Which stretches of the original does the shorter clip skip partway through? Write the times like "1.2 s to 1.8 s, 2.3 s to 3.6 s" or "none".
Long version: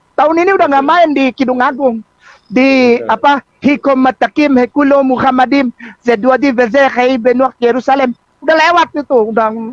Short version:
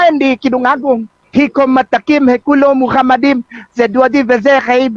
2.2 s to 3.5 s